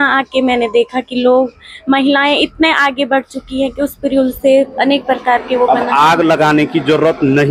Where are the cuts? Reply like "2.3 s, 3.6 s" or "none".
none